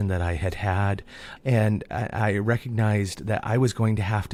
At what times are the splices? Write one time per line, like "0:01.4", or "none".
none